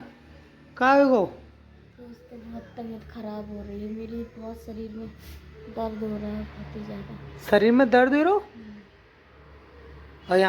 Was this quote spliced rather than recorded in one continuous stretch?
no; 0 cuts

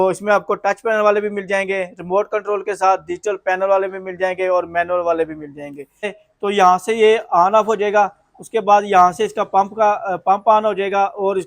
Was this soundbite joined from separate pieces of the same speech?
yes; 1 cut; at 6.2 s

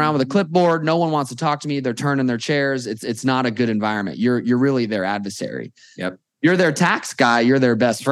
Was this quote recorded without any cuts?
yes; 0 cuts

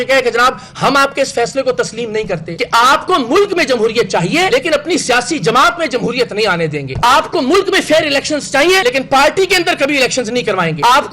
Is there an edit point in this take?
yes; 1 cut; at 2.6 s

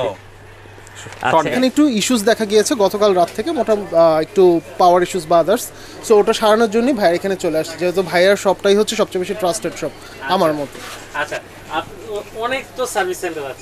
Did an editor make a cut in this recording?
yes; 1 cut; at 1.5 s

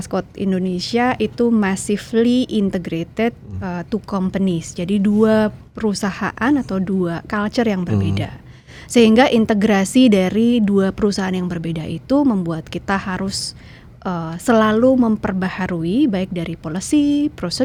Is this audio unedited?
yes; 0 cuts

